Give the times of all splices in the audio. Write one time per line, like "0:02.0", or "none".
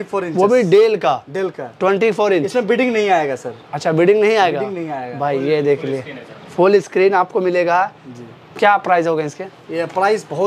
none